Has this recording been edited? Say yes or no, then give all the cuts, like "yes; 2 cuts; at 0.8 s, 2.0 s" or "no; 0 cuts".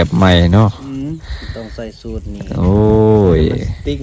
no; 0 cuts